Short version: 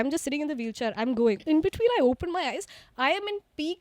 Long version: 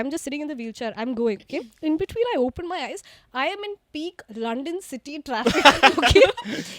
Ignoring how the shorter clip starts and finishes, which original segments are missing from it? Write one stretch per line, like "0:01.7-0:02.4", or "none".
0:01.4-0:01.8